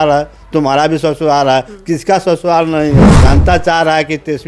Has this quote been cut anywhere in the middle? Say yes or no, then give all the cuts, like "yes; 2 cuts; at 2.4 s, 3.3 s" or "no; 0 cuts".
yes; 1 cut; at 3.1 s